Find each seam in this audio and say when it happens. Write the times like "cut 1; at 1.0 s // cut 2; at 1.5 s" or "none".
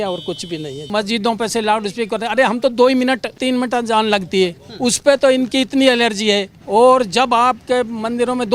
cut 1; at 0.9 s // cut 2; at 3.4 s // cut 3; at 6.5 s